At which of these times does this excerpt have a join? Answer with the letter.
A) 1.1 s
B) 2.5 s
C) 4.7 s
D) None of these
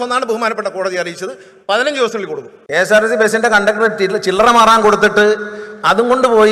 B